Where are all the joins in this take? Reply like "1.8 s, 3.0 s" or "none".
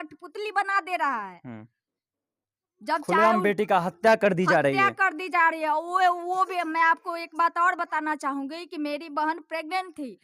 none